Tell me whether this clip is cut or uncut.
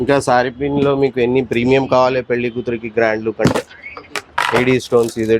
uncut